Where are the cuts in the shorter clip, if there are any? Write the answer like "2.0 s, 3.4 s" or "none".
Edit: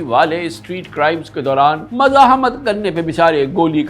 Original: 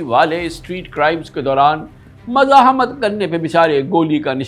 1.9 s